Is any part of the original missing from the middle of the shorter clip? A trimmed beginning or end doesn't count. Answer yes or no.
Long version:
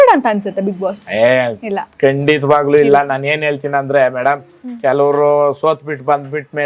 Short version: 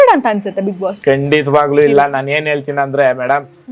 yes